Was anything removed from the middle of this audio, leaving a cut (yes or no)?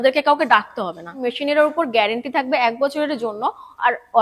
yes